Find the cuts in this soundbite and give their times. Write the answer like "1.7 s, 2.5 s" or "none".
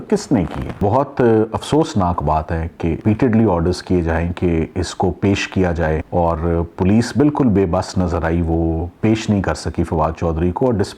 0.8 s, 3.0 s, 6.0 s